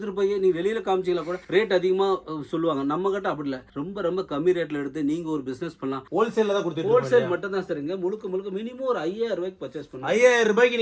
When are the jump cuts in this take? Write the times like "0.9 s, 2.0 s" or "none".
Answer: 6.0 s